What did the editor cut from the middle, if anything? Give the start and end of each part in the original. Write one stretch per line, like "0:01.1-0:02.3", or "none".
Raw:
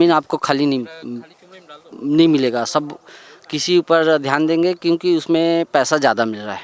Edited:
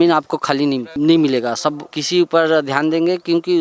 0:00.9-0:02.0
0:03.0-0:03.5